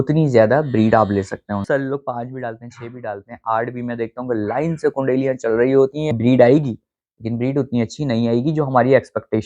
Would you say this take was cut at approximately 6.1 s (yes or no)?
yes